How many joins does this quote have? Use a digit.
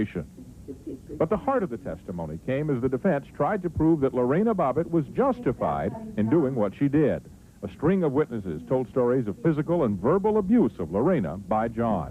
1